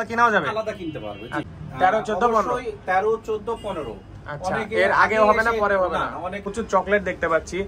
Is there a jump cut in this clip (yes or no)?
yes